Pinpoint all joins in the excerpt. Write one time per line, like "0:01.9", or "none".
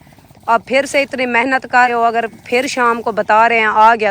0:01.9